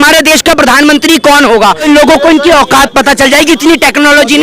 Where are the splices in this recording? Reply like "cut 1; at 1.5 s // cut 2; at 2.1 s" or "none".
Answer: cut 1; at 1.8 s